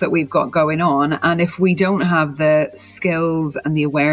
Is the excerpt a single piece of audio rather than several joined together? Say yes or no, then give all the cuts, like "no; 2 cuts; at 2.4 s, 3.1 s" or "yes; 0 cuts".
yes; 0 cuts